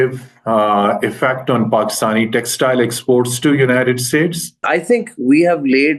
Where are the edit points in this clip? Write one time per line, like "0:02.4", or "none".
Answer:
0:04.6